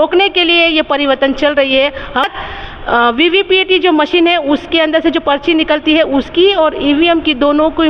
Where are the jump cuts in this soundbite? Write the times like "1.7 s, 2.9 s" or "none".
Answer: 2.2 s